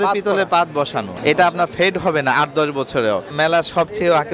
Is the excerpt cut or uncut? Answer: cut